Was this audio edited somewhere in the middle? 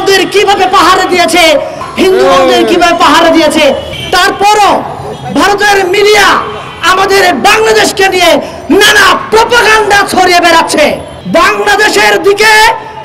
yes; 3 cuts; at 1.8 s, 3.9 s, 11.1 s

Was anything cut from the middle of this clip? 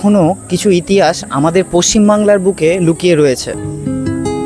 yes; 1 cut; at 3.5 s

